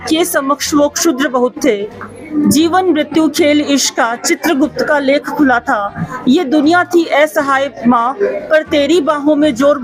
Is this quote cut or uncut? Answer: uncut